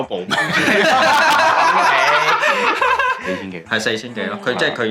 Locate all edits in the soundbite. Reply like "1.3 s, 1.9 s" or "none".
3.2 s